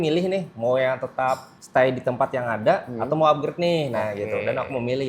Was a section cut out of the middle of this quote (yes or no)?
yes